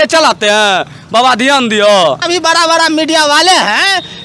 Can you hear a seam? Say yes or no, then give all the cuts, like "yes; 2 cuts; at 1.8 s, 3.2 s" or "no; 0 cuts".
yes; 1 cut; at 2.2 s